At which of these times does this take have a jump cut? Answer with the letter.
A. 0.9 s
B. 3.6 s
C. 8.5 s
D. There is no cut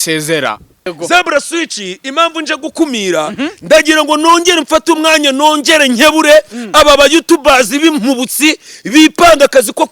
A